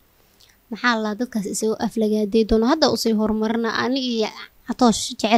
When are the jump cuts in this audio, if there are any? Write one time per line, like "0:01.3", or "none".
none